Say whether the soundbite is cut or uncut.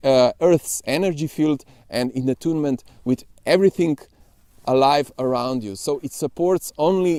uncut